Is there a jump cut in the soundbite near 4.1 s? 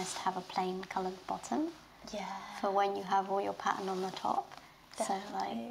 no; 0 cuts

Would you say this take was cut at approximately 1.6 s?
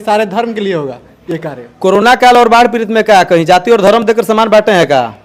no; 0 cuts

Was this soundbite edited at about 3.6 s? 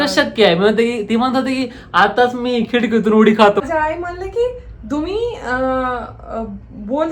yes; 1 cut; at 3.6 s

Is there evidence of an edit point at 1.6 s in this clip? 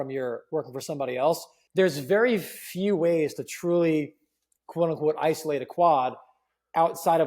yes; 1 cut; at 1.6 s

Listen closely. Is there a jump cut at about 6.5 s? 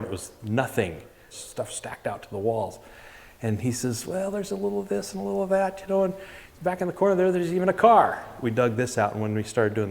no; 2 cuts; at 1.4 s, 8.3 s

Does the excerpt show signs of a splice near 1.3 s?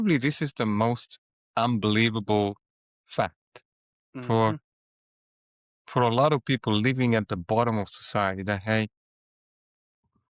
no; 0 cuts

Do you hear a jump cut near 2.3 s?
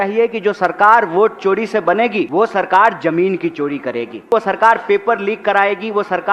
yes; 2 cuts; at 2.3 s, 4.3 s

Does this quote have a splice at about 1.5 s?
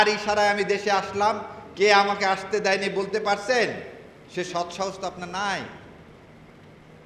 no; 0 cuts

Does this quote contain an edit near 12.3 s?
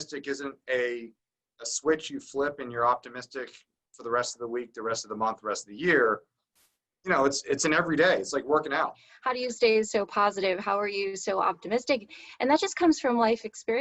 no; 1 cut; at 9.1 s

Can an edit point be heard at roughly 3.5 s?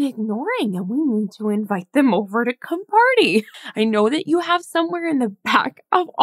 yes; 1 cut; at 3.5 s

